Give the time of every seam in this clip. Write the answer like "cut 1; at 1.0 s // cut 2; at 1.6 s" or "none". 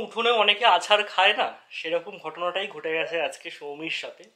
none